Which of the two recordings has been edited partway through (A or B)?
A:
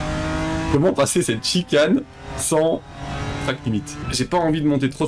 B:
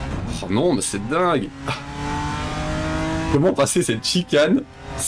A